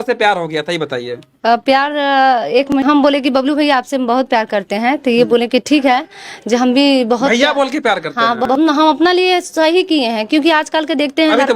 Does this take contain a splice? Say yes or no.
yes